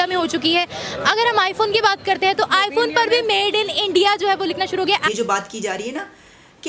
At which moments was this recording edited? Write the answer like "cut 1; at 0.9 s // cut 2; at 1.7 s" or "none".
cut 1; at 5.0 s